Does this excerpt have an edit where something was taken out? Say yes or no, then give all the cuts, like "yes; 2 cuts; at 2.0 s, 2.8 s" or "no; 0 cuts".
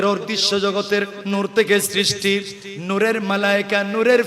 yes; 1 cut; at 1.2 s